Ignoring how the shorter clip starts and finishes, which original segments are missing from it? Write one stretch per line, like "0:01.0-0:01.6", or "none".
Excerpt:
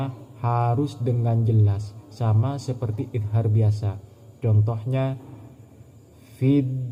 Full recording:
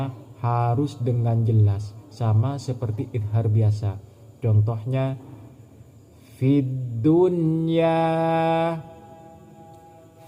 none